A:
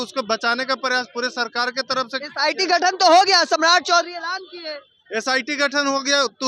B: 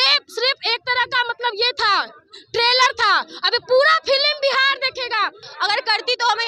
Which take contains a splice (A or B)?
B